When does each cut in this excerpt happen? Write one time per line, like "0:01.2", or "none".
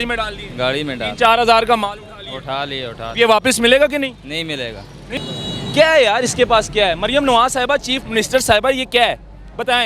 0:05.2